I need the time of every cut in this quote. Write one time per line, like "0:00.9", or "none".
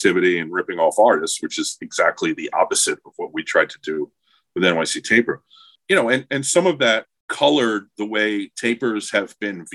0:05.7
0:07.2